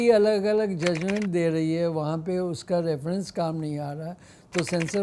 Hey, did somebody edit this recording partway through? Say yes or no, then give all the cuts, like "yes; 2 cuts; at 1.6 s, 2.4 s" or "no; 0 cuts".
no; 0 cuts